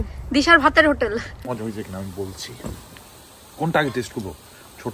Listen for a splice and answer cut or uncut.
cut